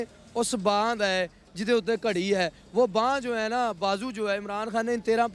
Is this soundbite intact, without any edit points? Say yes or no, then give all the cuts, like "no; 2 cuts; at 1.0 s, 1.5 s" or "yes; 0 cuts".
yes; 0 cuts